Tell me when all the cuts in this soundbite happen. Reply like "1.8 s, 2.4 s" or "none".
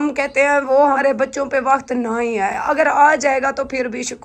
1.0 s